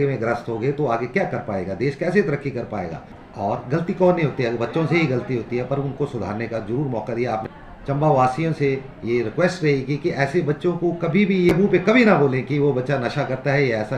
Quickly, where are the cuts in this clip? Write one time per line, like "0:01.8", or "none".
0:03.2
0:07.4
0:11.5